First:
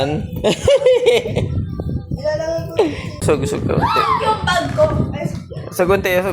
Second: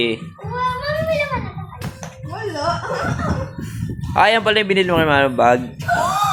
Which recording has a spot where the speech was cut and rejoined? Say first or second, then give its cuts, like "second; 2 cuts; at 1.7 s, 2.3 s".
first; 1 cut; at 3.2 s